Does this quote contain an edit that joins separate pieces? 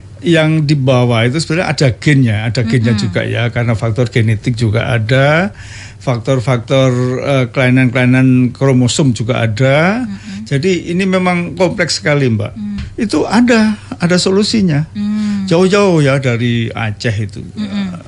yes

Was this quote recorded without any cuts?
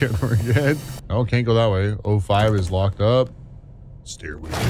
no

